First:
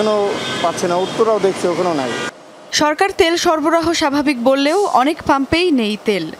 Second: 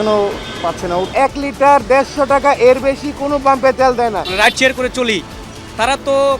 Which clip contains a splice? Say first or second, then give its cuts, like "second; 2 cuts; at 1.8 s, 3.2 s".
second; 2 cuts; at 1.1 s, 4.3 s